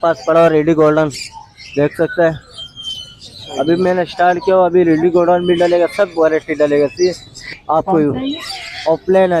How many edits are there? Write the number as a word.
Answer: one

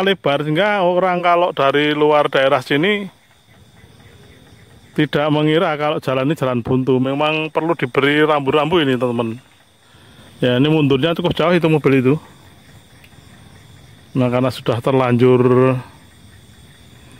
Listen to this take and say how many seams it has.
zero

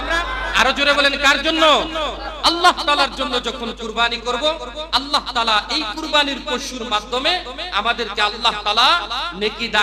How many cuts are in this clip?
zero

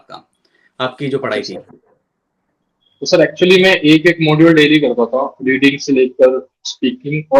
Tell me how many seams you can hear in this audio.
zero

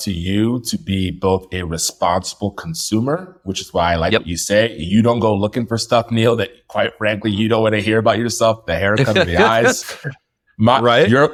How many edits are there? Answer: zero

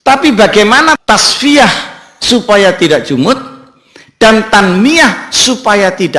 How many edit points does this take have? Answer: one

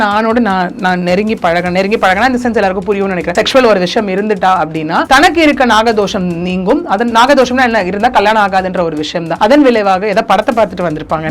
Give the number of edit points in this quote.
three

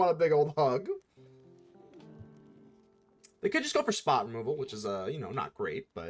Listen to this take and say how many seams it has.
zero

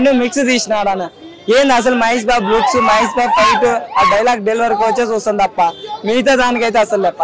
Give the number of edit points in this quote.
zero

